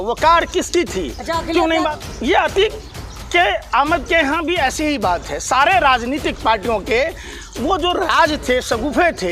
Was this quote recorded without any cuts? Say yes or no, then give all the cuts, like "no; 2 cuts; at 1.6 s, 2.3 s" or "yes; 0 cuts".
no; 1 cut; at 1.9 s